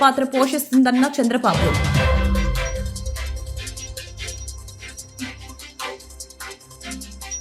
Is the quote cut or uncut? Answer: cut